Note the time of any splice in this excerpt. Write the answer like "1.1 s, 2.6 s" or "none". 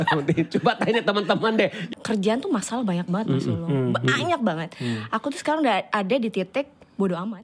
1.8 s